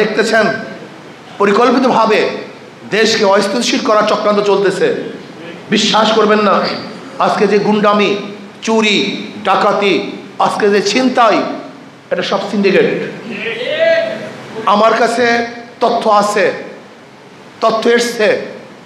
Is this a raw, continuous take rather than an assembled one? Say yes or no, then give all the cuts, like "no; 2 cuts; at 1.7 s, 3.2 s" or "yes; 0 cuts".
yes; 0 cuts